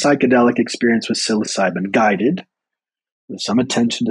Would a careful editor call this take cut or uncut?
uncut